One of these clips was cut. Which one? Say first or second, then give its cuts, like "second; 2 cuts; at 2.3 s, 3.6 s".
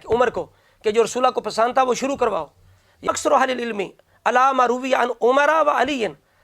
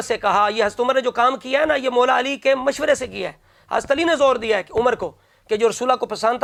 first; 1 cut; at 3.1 s